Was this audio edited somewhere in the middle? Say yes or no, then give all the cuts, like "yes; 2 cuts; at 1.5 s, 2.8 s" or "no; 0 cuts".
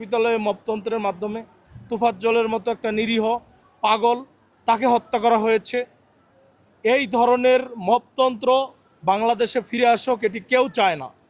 no; 0 cuts